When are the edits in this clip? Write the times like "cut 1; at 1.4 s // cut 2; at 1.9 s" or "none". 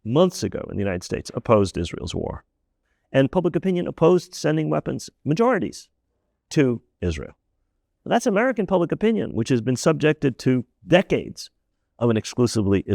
cut 1; at 2.7 s // cut 2; at 11.6 s